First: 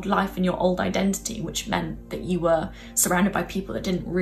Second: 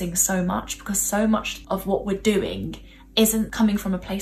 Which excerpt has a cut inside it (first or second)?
second